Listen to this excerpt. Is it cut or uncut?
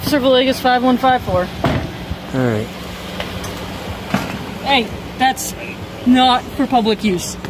uncut